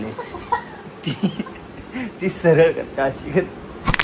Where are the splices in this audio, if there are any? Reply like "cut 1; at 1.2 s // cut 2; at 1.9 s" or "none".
none